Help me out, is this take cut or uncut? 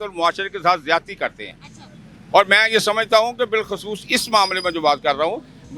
uncut